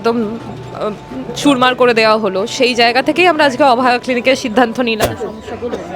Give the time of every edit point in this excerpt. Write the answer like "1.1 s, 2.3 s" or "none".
5.0 s